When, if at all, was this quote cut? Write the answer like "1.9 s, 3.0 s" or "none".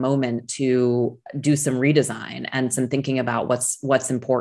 none